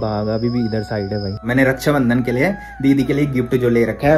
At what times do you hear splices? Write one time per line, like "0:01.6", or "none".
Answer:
0:01.4